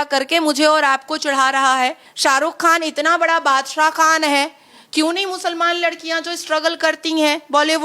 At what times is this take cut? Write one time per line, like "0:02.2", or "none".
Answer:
0:02.1